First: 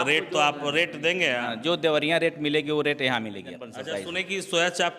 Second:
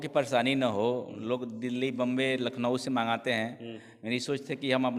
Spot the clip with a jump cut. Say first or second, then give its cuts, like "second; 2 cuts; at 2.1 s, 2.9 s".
first; 1 cut; at 3.7 s